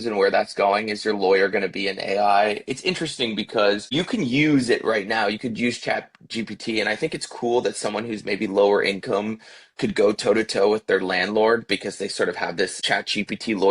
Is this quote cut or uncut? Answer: cut